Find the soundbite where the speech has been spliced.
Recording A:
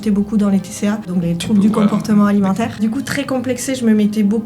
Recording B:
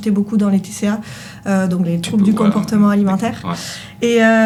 A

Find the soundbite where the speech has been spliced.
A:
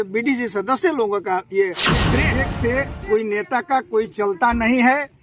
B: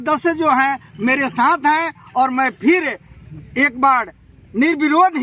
A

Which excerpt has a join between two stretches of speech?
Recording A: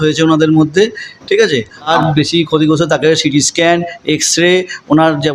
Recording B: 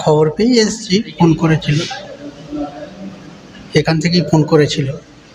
A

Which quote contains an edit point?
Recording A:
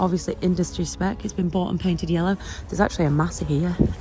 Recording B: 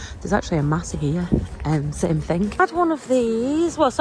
B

